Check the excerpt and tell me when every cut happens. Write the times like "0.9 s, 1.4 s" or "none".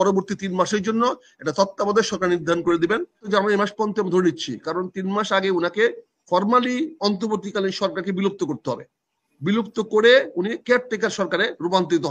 3.2 s

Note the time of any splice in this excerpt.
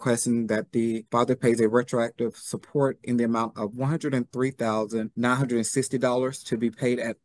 1.0 s, 5.1 s

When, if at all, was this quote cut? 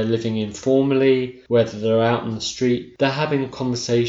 1.3 s, 2.9 s

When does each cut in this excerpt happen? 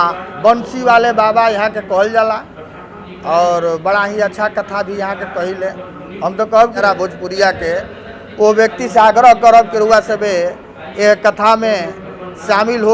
6.8 s

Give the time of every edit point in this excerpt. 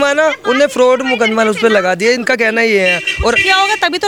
none

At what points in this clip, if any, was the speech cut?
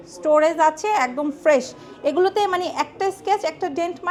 none

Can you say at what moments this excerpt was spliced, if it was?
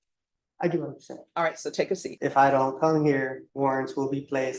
2.1 s, 3.4 s

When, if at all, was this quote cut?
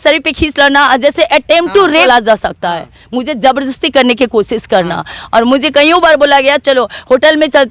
2.0 s

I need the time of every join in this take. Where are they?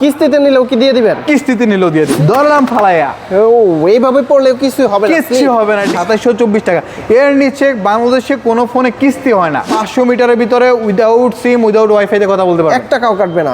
2.1 s, 5.9 s, 9.7 s

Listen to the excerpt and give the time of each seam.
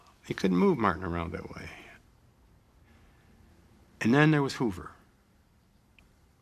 4.5 s

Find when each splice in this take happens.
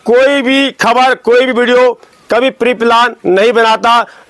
none

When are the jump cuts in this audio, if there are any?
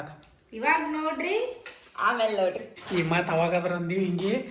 2.7 s

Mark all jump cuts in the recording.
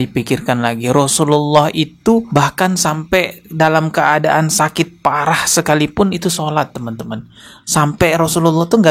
none

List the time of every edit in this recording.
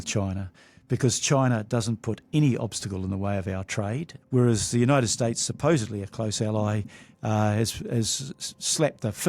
4.1 s

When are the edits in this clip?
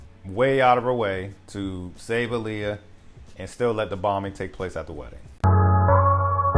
5.4 s

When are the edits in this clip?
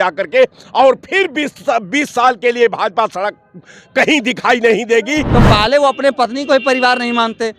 5.3 s

